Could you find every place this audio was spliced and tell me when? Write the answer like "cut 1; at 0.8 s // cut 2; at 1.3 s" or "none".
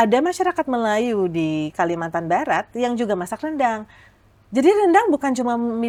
none